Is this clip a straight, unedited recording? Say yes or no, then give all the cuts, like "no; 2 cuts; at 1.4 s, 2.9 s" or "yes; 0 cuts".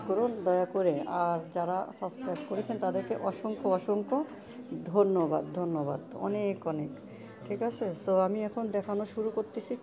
yes; 0 cuts